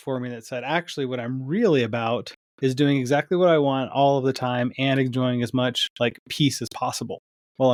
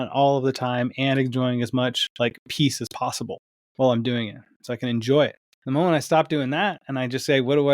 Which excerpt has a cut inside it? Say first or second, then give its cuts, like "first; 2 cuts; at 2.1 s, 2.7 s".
second; 1 cut; at 5.5 s